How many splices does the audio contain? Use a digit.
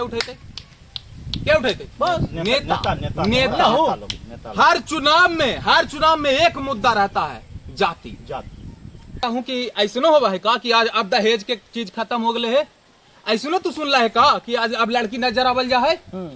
1